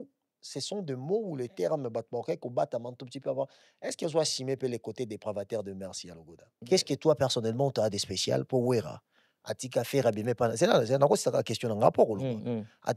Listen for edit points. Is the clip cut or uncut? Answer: cut